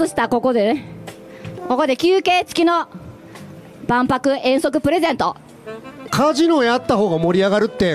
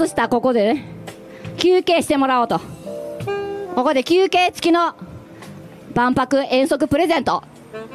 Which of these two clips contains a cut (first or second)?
first